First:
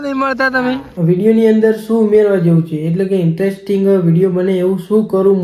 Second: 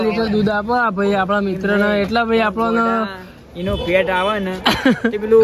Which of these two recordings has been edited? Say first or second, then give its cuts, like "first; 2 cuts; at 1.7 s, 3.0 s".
first; 1 cut; at 1.0 s